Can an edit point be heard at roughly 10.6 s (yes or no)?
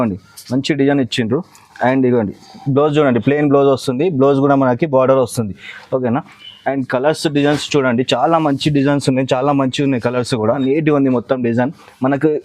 yes